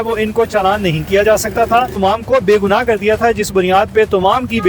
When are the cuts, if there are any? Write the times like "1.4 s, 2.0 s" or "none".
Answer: 2.0 s

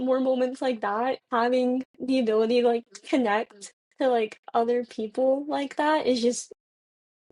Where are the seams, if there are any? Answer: 1.2 s

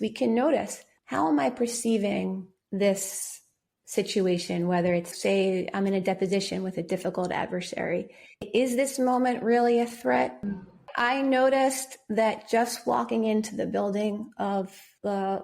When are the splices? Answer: 10.4 s

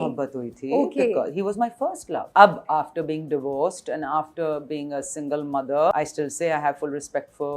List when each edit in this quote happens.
2.3 s, 5.9 s

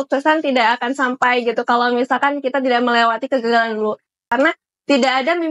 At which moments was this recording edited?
4.3 s

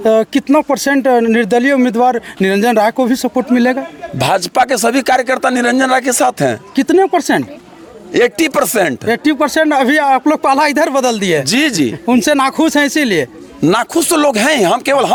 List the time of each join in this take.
none

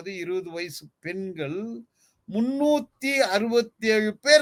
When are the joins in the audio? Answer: none

